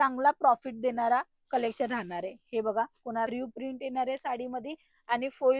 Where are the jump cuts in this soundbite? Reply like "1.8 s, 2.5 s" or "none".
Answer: 3.3 s